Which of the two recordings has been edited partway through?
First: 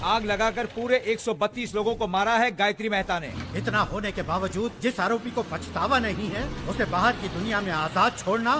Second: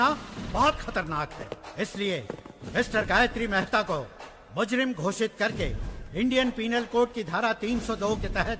first; 1 cut; at 3.2 s

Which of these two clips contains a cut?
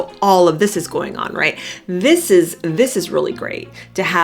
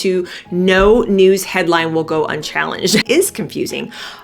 second; 1 cut; at 3.0 s

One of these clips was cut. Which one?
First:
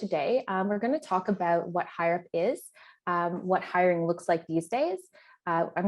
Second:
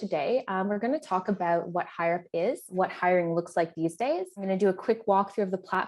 second; 2 cuts; at 2.7 s, 4.4 s

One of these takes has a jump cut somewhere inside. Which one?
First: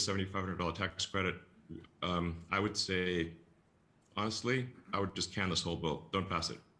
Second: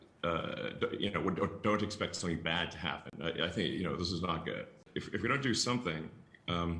second; 1 cut; at 4.8 s

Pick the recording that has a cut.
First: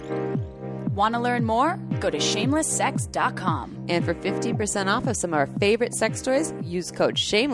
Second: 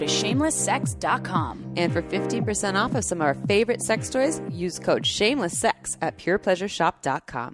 first; 1 cut; at 0.9 s

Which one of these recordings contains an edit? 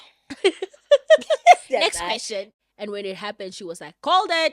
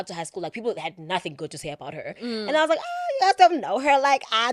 first; 1 cut; at 2.5 s

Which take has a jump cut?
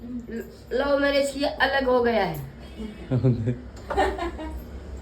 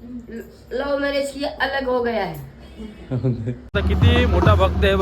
second; 1 cut; at 3.7 s

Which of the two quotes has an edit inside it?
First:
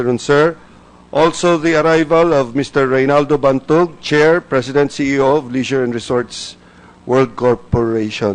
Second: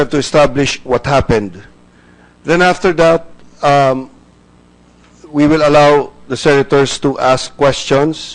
first; 1 cut; at 6.4 s

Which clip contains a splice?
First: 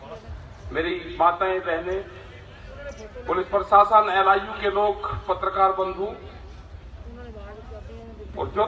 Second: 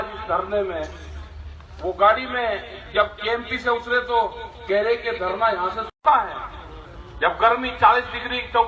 second; 1 cut; at 6.0 s

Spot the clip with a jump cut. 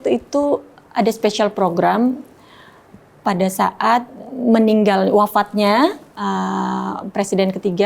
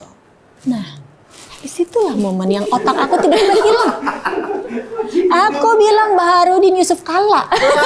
first; 1 cut; at 4.2 s

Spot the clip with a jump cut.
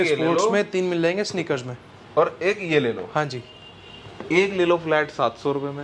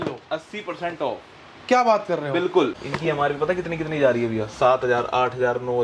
second; 1 cut; at 2.9 s

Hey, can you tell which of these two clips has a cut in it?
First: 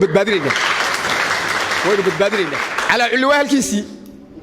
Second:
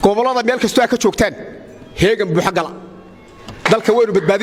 first; 1 cut; at 2.7 s

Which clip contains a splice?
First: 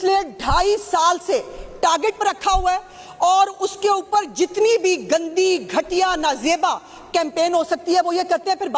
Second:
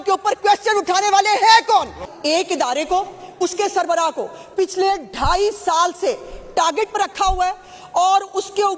second; 1 cut; at 2.1 s

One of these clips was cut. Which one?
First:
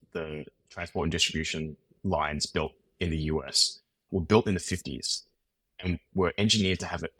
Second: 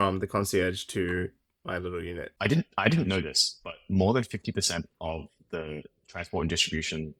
second; 1 cut; at 2.3 s

